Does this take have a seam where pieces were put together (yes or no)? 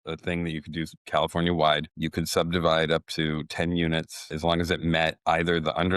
yes